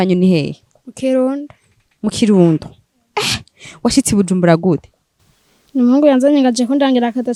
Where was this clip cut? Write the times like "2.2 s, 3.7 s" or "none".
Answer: none